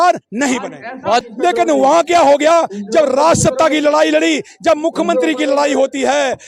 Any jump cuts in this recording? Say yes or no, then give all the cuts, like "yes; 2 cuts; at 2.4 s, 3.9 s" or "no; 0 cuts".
yes; 1 cut; at 1.2 s